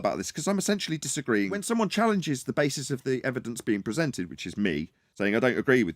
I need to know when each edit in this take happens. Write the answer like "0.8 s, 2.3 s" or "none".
1.6 s